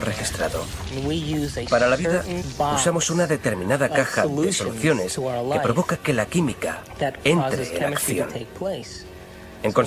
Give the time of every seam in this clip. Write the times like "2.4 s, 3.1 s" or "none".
1.2 s